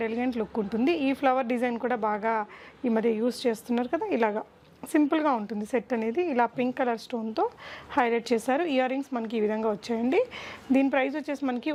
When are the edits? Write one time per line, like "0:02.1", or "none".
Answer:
none